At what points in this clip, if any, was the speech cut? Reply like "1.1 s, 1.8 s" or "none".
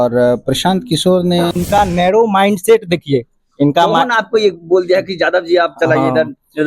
1.6 s